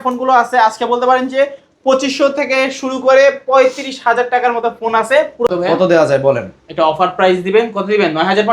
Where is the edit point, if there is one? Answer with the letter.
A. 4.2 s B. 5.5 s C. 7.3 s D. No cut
B